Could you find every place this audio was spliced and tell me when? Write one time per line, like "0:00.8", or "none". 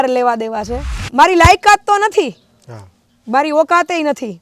0:01.0